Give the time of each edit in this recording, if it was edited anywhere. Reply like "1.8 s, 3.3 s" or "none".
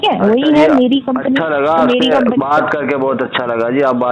none